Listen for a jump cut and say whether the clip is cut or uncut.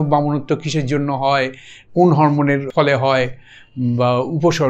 cut